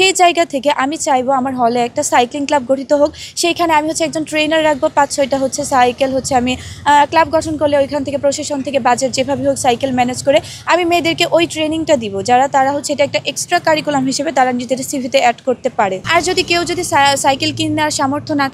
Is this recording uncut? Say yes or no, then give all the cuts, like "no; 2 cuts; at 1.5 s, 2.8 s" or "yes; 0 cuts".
no; 1 cut; at 16.0 s